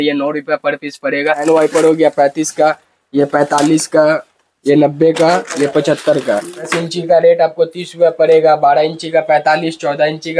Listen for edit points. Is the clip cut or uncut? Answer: cut